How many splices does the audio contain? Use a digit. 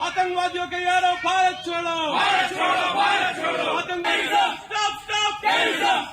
1